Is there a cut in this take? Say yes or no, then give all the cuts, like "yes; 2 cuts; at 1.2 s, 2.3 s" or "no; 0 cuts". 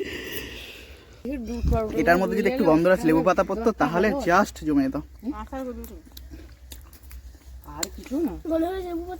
yes; 1 cut; at 1.3 s